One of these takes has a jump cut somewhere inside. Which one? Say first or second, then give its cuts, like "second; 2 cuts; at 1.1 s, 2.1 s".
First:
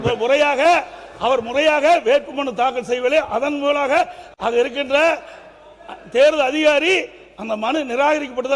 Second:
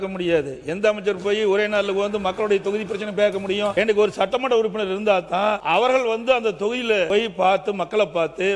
second; 3 cuts; at 3.7 s, 5.6 s, 7.1 s